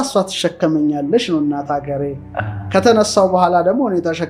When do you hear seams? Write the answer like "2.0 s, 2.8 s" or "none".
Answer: none